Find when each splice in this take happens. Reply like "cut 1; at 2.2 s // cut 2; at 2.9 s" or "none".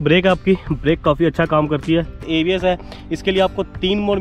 cut 1; at 2.2 s